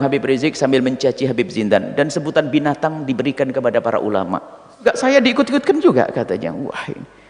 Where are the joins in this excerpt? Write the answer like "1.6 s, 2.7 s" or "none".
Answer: 5.0 s